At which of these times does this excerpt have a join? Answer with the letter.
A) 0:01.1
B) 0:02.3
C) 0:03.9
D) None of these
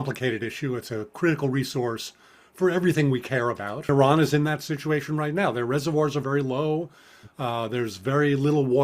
C